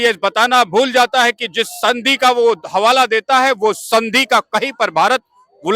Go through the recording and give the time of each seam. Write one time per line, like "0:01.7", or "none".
none

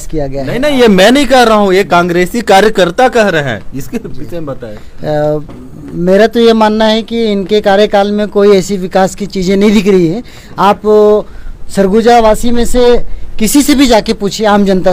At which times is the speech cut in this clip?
none

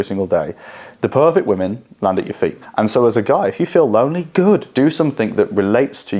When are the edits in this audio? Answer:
0:02.6
0:04.7

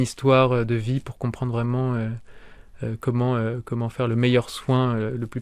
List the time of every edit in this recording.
none

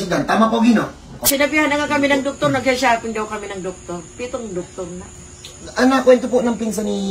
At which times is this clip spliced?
0:01.2

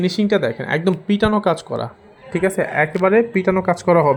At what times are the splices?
none

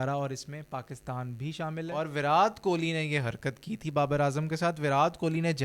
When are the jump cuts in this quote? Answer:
0:01.9

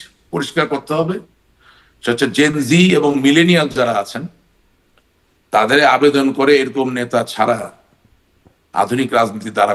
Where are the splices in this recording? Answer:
none

